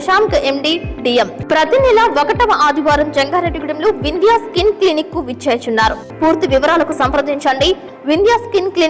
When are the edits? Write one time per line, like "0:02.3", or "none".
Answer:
0:01.4
0:06.1